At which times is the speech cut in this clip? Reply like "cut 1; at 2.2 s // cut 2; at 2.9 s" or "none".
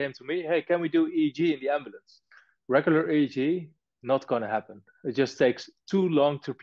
cut 1; at 2.5 s

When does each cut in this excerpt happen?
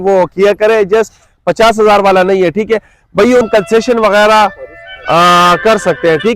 cut 1; at 3.4 s

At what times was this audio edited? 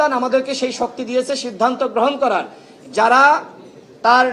cut 1; at 2.7 s

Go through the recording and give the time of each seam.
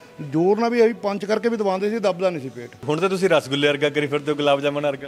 cut 1; at 2.8 s

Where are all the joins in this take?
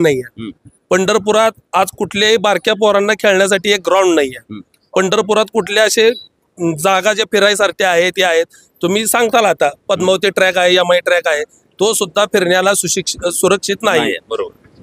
none

